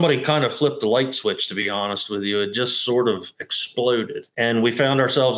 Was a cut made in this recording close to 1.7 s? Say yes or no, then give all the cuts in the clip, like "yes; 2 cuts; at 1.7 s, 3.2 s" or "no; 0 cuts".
no; 1 cut; at 4.2 s